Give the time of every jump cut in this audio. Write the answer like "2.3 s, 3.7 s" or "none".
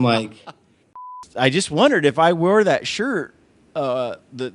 1.1 s